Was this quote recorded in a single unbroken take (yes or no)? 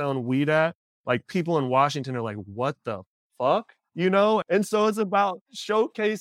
no